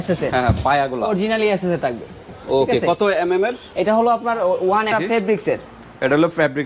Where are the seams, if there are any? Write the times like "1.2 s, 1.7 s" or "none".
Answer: 4.9 s

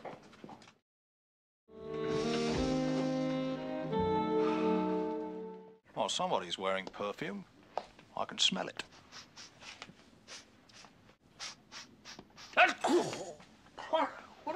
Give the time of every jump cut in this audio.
none

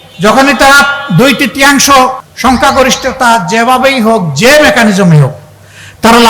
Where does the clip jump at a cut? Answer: 2.3 s

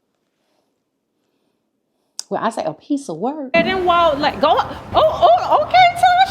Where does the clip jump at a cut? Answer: 3.5 s

